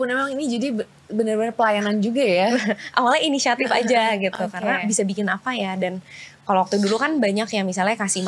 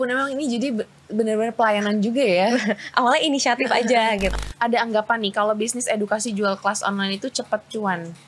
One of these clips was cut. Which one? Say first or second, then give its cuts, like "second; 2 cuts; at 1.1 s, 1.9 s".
second; 1 cut; at 4.4 s